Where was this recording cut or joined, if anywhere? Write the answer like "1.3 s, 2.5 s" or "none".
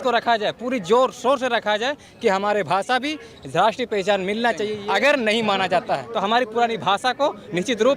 4.7 s, 6.1 s